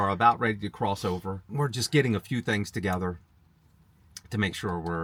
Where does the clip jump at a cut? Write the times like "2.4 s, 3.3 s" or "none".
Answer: none